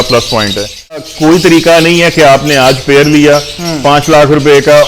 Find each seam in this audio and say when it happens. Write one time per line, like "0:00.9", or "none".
0:01.1